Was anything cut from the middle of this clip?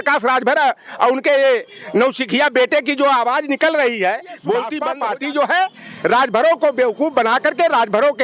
yes; 1 cut; at 4.8 s

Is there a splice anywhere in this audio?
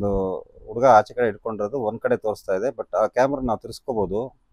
no; 0 cuts

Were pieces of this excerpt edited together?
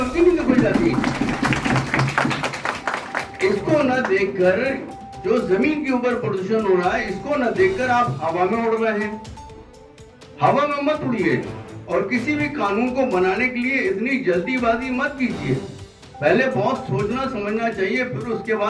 no; 0 cuts

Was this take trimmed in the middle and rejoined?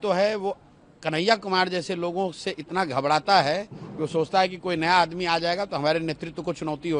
no; 0 cuts

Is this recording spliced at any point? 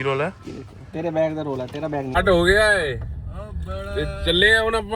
yes; 1 cut; at 2.1 s

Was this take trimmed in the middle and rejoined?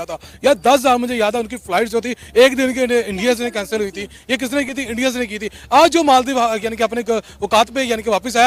no; 0 cuts

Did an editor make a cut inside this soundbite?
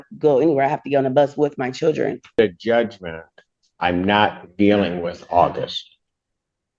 yes; 1 cut; at 2.3 s

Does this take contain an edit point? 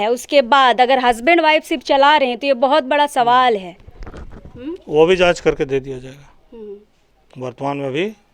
no; 0 cuts

